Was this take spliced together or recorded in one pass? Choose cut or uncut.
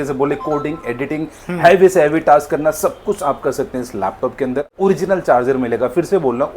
cut